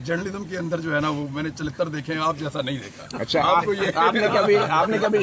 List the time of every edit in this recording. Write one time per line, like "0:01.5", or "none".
none